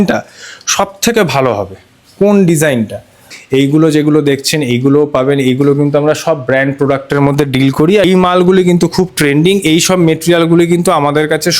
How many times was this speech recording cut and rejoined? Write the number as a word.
two